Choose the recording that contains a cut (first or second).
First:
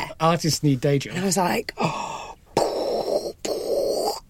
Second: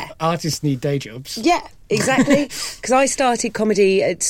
first